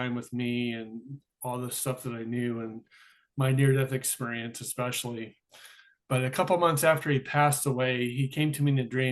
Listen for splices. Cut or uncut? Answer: uncut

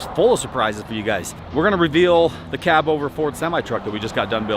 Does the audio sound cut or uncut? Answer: cut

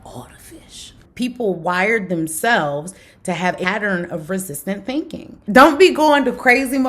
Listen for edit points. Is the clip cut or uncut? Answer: cut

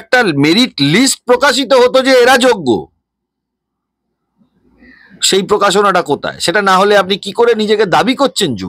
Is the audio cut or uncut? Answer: uncut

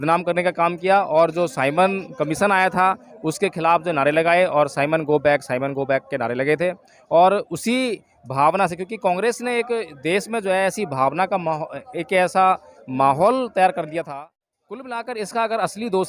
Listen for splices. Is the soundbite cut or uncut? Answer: cut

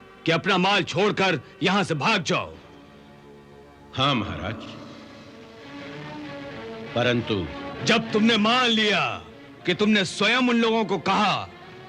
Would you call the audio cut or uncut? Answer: uncut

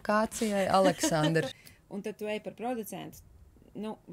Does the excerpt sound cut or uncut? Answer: cut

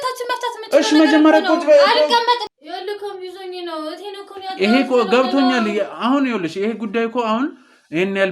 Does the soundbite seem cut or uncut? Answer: cut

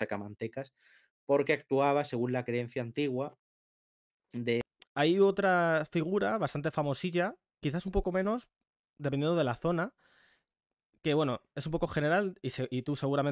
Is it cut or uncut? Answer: cut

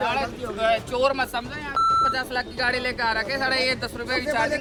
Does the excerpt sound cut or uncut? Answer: uncut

